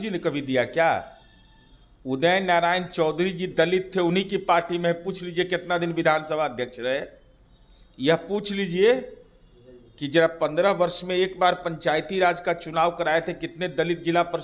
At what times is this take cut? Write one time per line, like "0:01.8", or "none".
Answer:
none